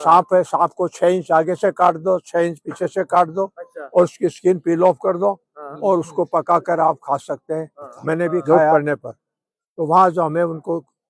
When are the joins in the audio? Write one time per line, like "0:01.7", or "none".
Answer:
0:08.7